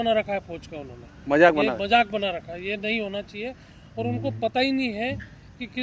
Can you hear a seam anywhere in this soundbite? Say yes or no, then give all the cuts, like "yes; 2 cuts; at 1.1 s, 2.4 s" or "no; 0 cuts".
no; 0 cuts